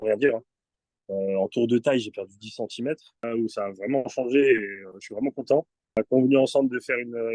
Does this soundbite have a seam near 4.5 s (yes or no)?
no